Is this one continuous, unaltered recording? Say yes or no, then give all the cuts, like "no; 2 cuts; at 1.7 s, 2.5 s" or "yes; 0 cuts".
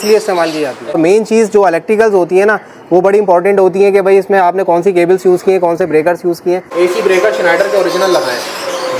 no; 2 cuts; at 1.0 s, 6.7 s